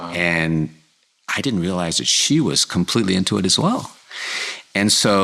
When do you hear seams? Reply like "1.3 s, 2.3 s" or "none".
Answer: none